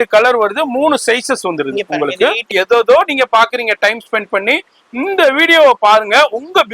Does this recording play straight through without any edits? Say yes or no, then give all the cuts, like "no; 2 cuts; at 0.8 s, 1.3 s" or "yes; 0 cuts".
no; 1 cut; at 2.5 s